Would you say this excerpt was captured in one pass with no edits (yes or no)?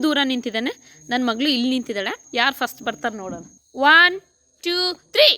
no